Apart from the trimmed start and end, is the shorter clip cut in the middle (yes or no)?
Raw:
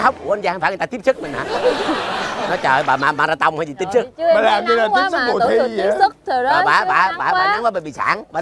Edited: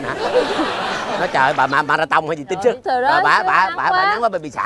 yes